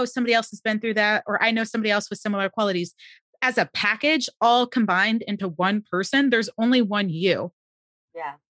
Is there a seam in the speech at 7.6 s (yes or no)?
no